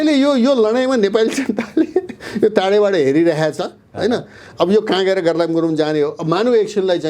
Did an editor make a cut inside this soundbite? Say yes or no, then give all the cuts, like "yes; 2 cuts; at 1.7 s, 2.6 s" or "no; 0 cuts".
no; 0 cuts